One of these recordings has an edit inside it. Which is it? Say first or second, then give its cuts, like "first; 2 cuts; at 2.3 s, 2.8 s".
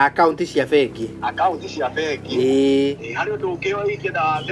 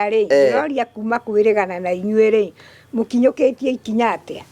first; 1 cut; at 3.1 s